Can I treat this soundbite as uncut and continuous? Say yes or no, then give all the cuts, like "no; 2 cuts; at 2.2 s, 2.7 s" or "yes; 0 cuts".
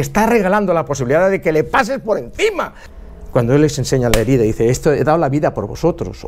no; 1 cut; at 2.8 s